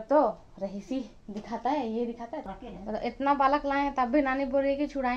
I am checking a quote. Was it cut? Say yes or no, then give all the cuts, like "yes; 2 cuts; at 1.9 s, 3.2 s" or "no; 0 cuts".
yes; 1 cut; at 2.5 s